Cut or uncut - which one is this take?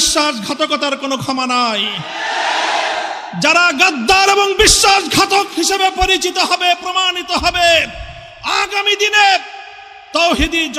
uncut